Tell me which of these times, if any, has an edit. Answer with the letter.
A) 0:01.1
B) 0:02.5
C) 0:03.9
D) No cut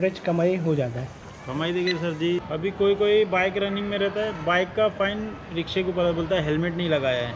B